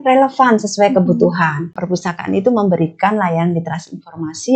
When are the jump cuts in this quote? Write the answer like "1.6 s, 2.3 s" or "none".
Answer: 1.7 s